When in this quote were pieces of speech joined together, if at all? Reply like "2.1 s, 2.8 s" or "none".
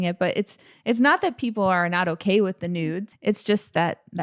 3.0 s

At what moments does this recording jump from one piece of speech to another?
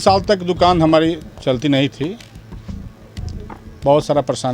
2.4 s, 3.7 s

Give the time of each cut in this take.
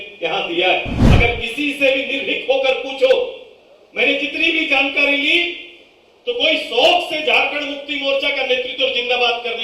1.0 s

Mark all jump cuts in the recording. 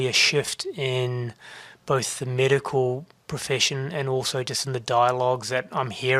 none

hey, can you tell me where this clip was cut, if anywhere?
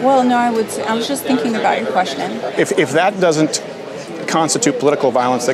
2.5 s

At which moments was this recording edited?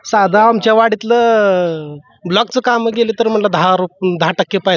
none

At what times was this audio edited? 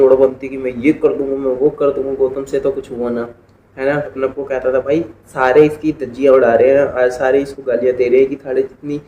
4.2 s

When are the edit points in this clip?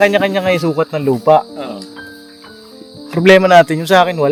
none

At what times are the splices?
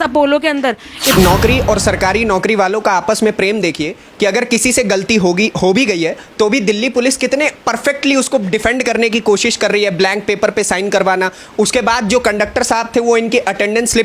1.1 s

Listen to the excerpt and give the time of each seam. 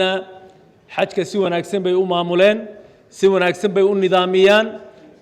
none

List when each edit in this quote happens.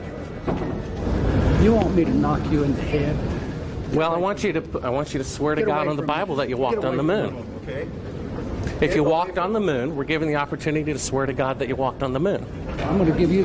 1.0 s

